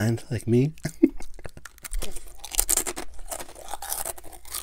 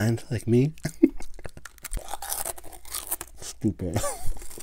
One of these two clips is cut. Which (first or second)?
second